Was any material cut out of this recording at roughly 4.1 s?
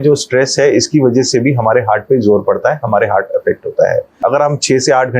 yes; 1 cut; at 4.1 s

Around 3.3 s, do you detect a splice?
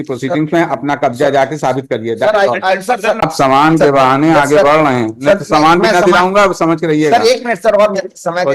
yes; 1 cut; at 3.3 s

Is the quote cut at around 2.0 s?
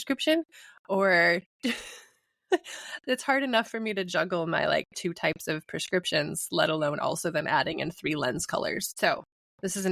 no; 1 cut; at 8.9 s

